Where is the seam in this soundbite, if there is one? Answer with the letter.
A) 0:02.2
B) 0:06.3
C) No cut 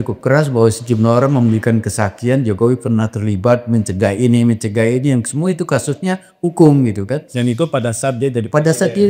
C